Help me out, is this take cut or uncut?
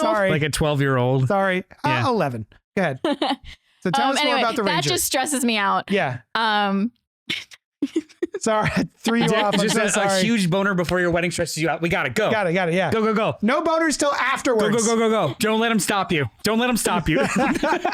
cut